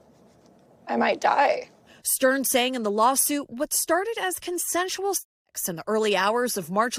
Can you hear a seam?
no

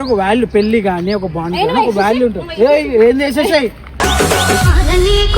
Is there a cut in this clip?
yes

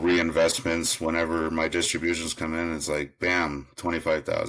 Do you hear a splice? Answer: no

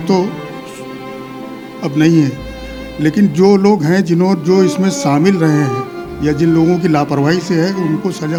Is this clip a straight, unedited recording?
yes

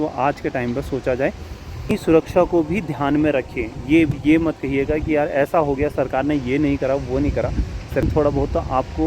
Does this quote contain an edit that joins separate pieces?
yes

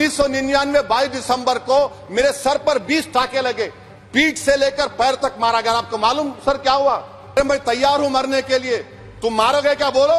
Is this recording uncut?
no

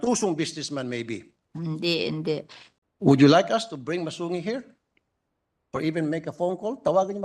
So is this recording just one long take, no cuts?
no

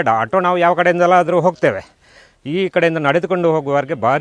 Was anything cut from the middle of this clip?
no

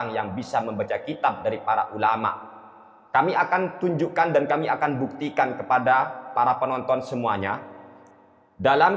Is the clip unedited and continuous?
yes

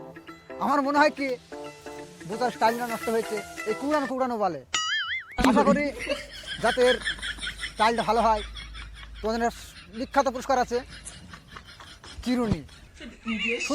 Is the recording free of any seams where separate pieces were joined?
yes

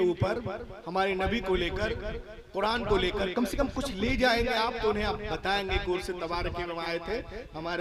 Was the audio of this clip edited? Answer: no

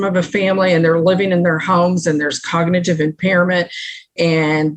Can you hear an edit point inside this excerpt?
no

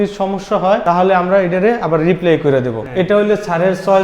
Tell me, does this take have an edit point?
yes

